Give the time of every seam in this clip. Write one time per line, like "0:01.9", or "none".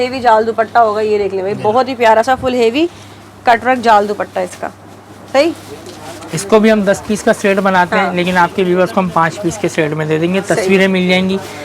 none